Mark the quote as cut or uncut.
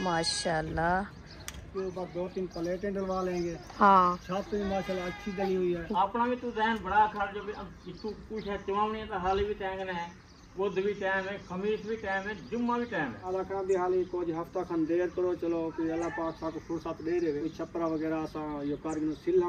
cut